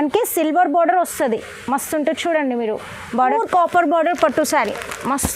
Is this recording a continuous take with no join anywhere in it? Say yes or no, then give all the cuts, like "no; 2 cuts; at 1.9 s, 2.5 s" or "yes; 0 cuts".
no; 1 cut; at 3.3 s